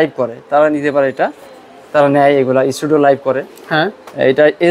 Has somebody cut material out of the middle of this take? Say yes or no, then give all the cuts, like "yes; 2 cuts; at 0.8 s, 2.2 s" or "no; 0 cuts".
no; 0 cuts